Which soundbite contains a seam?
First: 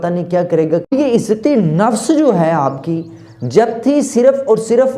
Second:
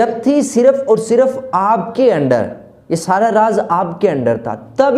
first; 1 cut; at 0.9 s

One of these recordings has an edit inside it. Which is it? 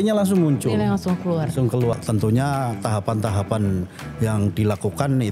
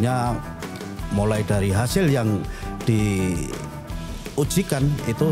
first; 1 cut; at 1.9 s

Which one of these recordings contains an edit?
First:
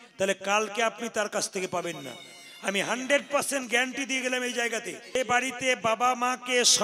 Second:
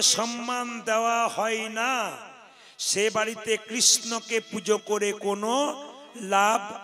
first; 1 cut; at 5.1 s

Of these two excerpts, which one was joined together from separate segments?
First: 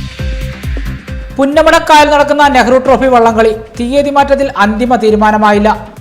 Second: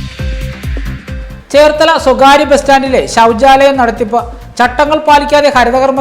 first; 1 cut; at 1.2 s

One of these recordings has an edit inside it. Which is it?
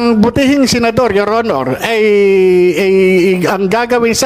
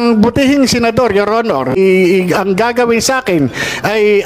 second; 1 cut; at 1.8 s

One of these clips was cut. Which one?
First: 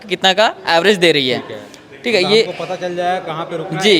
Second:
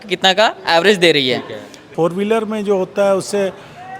second; 1 cut; at 1.9 s

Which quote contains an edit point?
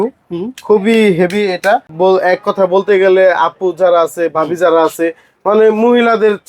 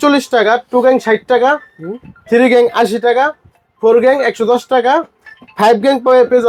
first; 1 cut; at 1.9 s

